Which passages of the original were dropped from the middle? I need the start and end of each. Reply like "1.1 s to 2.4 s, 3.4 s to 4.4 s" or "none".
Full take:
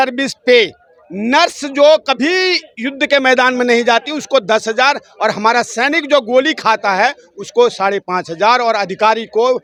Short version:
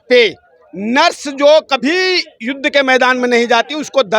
none